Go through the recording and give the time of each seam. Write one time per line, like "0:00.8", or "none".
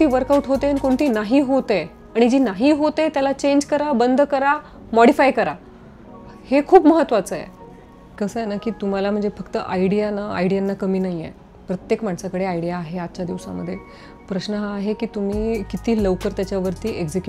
none